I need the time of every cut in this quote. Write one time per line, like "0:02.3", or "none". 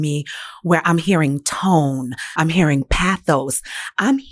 0:02.2